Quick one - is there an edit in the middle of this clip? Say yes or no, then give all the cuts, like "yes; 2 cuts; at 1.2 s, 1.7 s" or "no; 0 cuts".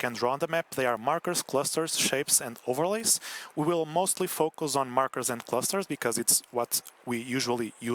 no; 0 cuts